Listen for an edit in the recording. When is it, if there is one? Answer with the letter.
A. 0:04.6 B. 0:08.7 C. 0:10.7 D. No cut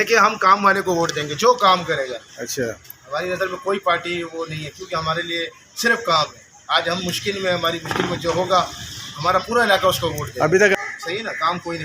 C